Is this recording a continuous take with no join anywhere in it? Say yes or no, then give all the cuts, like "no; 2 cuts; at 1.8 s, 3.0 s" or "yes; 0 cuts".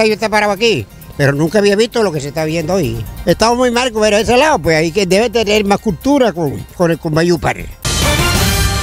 no; 2 cuts; at 3.0 s, 7.8 s